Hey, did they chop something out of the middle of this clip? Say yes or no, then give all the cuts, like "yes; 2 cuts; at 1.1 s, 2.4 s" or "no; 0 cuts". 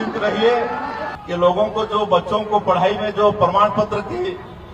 yes; 1 cut; at 1.0 s